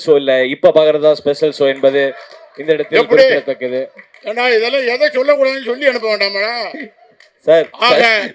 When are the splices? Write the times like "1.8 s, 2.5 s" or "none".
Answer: none